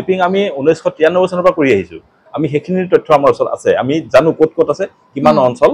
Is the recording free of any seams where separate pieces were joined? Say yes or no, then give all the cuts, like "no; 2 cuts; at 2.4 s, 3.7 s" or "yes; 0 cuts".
no; 1 cut; at 1.9 s